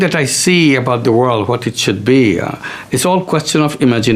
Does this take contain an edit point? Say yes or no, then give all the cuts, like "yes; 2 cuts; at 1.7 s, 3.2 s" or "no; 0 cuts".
no; 0 cuts